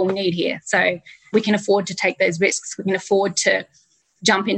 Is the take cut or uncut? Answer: cut